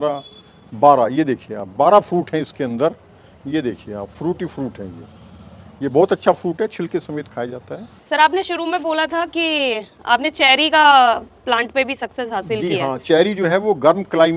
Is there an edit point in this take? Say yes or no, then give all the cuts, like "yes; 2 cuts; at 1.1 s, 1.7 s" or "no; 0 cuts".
no; 0 cuts